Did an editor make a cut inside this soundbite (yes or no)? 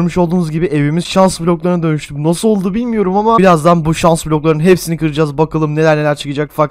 no